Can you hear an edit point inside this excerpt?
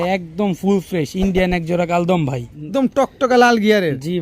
yes; 1 cut; at 2.6 s

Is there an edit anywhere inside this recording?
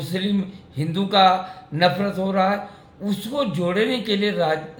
no; 0 cuts

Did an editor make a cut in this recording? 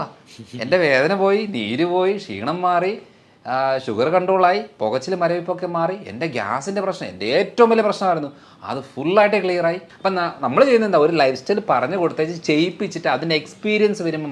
yes; 1 cut; at 9.9 s

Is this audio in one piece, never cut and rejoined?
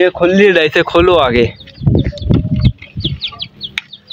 yes; 0 cuts

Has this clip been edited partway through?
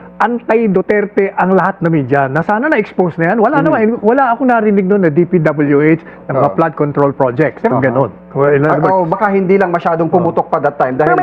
yes; 1 cut; at 7.7 s

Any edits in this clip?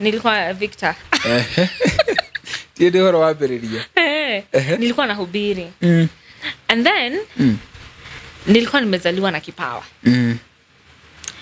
no; 0 cuts

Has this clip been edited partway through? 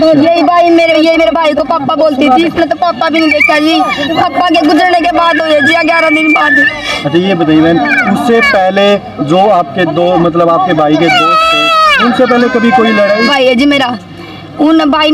yes; 1 cut; at 13.3 s

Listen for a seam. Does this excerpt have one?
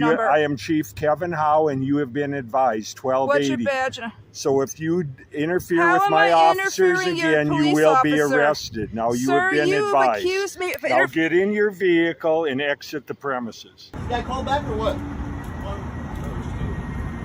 yes; 1 cut; at 13.9 s

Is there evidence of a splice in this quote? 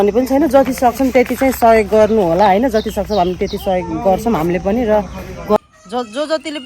yes; 1 cut; at 5.6 s

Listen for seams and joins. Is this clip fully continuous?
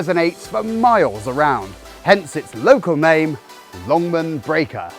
yes; 0 cuts

